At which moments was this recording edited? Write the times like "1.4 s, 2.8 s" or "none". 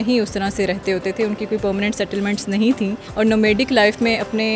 3.0 s